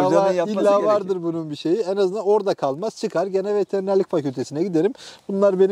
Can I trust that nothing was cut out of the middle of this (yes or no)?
yes